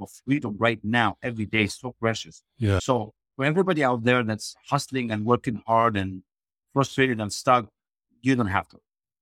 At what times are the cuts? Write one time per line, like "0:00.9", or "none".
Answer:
0:02.8